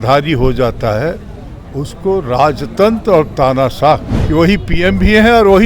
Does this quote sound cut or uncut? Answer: cut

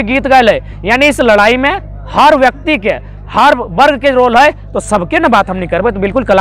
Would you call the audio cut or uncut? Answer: uncut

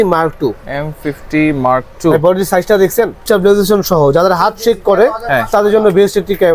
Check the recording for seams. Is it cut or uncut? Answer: cut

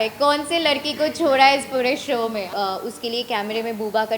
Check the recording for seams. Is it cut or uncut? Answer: cut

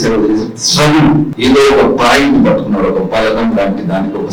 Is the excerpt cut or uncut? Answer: cut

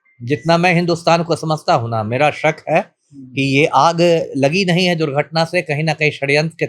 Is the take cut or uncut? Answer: uncut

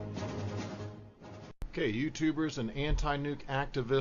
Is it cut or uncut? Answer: cut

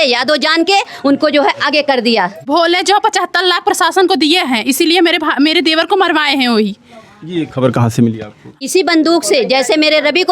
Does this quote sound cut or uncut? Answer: cut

